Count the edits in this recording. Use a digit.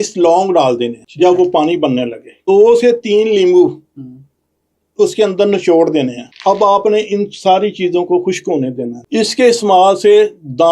4